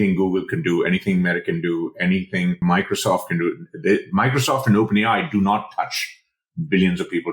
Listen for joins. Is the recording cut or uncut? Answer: cut